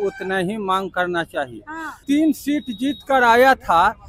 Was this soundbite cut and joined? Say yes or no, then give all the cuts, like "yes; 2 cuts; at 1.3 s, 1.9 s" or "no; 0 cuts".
yes; 1 cut; at 2.0 s